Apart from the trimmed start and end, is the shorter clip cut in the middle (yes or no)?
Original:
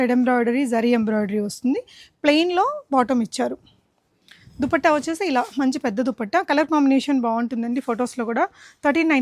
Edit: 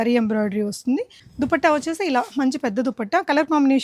yes